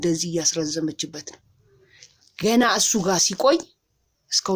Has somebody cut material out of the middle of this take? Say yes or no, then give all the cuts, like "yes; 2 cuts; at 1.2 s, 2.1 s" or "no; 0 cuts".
no; 0 cuts